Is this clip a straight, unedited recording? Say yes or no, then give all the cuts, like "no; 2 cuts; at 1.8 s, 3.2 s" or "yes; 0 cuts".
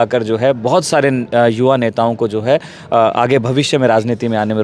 yes; 0 cuts